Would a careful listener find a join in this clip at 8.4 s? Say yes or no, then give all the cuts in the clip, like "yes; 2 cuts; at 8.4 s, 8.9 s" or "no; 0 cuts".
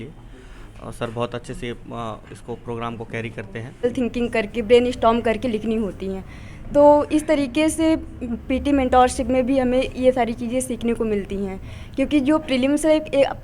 no; 1 cut; at 3.8 s